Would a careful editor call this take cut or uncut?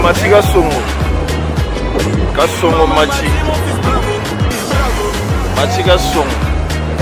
uncut